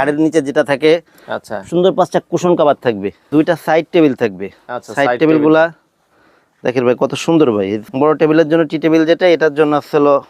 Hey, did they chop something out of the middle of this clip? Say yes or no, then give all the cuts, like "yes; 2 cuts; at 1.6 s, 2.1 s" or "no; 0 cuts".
yes; 2 cuts; at 3.3 s, 7.8 s